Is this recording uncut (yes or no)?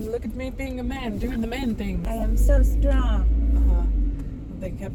yes